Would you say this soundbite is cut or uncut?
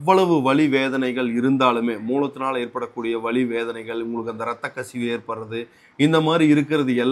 uncut